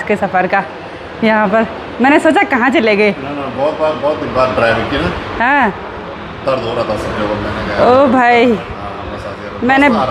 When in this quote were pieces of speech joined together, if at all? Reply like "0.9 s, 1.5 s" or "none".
none